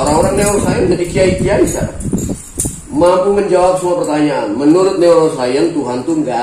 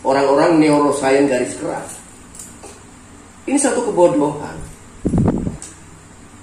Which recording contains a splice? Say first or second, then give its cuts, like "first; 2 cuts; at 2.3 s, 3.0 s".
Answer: second; 1 cut; at 5.5 s